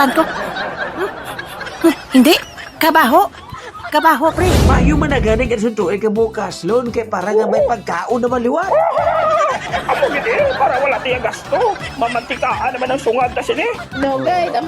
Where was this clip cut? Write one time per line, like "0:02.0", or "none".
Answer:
0:04.6